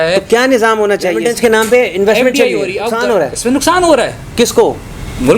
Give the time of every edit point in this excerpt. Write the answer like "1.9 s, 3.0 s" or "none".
1.3 s, 2.9 s